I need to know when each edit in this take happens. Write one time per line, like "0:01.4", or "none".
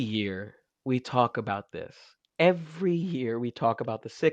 none